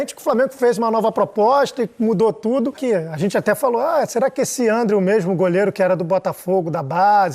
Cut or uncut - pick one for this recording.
cut